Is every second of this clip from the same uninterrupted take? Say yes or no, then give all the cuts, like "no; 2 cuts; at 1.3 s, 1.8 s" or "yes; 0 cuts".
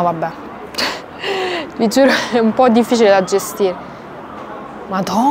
yes; 0 cuts